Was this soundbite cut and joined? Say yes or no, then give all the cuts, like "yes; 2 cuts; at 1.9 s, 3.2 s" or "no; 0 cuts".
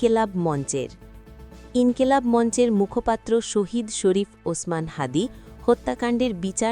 no; 0 cuts